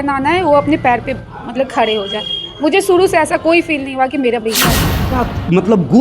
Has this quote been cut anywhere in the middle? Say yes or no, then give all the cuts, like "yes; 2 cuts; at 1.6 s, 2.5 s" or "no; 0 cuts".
yes; 1 cut; at 4.7 s